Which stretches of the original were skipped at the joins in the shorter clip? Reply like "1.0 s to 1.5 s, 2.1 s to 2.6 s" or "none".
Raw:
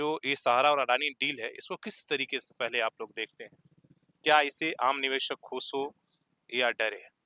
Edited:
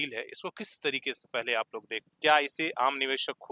3.3 s to 4.0 s